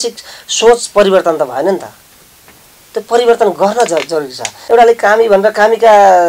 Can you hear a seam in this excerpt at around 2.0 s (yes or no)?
no